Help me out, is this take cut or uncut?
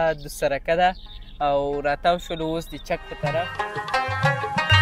cut